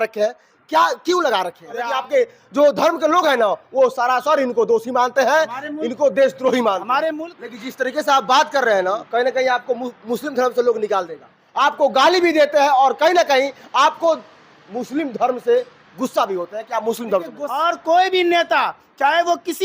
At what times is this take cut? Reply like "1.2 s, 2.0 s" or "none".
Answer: 1.8 s, 7.1 s, 11.4 s, 17.4 s

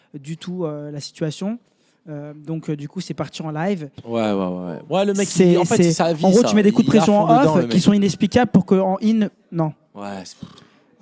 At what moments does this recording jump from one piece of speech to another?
4.0 s

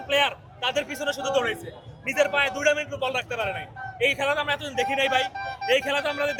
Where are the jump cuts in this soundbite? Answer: none

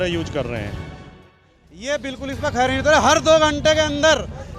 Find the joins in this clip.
1.2 s

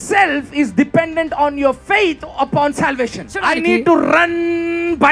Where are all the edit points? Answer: 3.4 s

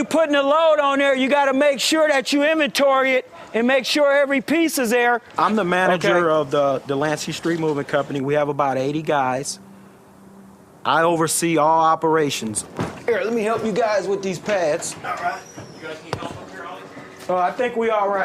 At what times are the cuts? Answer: 4.1 s

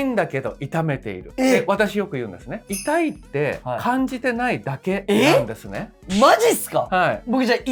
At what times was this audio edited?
none

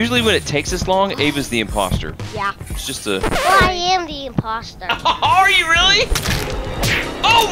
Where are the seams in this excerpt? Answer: 3.2 s

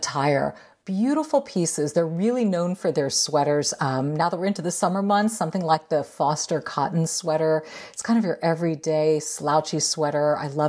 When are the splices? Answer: none

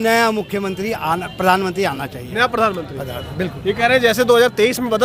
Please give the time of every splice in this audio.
none

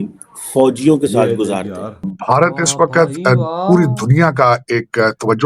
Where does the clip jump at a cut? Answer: 2.2 s

